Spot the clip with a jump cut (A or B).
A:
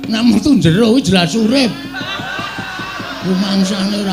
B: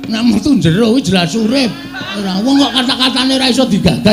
B